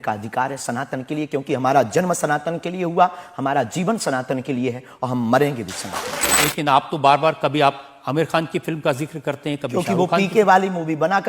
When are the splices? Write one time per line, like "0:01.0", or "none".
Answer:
0:06.4